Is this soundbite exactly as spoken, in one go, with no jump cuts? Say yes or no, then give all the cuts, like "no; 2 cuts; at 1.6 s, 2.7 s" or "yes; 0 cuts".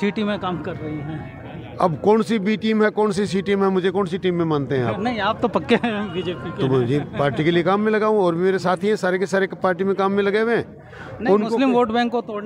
yes; 0 cuts